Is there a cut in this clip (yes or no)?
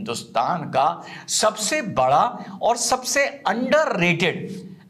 no